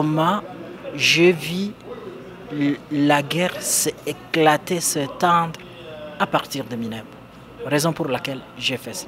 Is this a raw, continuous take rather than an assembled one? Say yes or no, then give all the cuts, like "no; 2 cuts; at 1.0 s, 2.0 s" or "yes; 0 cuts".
yes; 0 cuts